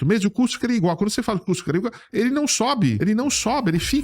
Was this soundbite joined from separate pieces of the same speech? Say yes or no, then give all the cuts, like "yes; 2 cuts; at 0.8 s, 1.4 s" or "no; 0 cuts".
yes; 1 cut; at 3.0 s